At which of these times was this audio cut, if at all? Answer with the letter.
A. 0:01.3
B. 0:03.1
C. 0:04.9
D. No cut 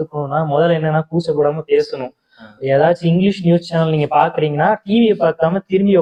D